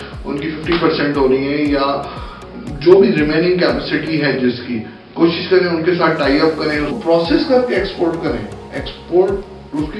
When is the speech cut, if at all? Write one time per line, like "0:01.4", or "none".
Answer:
0:06.9